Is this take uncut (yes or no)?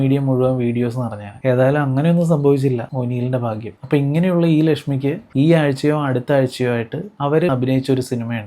no